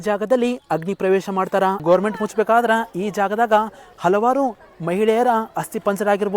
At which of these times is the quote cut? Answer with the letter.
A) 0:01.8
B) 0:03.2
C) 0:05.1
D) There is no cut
A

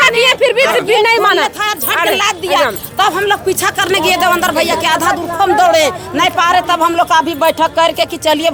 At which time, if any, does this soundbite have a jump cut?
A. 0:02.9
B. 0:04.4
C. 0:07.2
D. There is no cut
D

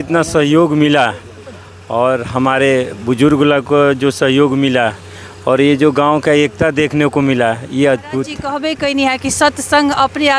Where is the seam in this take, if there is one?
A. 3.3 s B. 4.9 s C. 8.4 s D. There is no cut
C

